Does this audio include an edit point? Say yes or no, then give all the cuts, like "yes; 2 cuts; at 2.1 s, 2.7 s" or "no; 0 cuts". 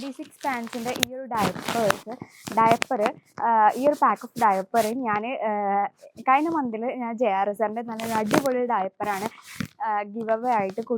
no; 0 cuts